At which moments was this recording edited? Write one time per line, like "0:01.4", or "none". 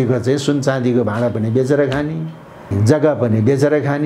0:02.7